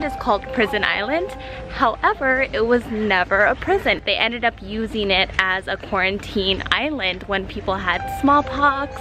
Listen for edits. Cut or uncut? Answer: uncut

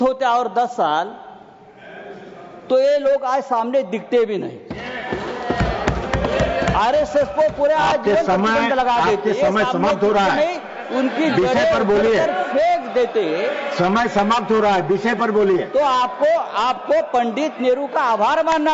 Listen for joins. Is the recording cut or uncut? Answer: uncut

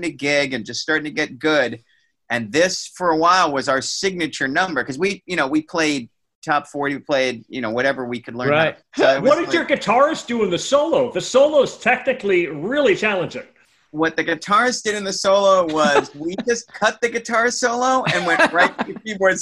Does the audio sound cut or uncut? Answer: cut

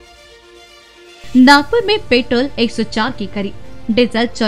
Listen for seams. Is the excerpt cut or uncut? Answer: cut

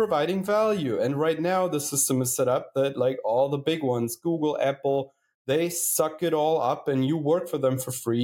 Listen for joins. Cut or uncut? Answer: uncut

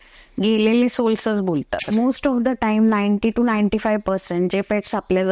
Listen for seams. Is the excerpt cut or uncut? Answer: cut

